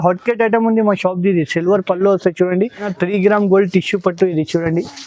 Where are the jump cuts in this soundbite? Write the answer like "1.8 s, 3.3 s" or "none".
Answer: 2.9 s